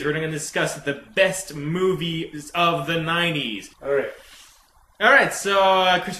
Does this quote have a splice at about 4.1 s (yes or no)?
yes